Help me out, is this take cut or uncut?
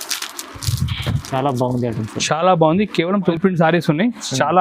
cut